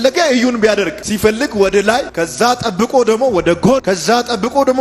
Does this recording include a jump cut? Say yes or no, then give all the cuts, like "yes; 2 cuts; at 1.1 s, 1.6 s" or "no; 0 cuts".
yes; 3 cuts; at 1.0 s, 2.1 s, 3.8 s